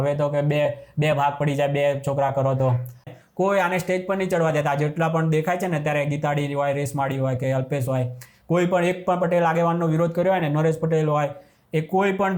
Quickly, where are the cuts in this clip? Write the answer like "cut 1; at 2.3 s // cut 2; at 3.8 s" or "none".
cut 1; at 3.1 s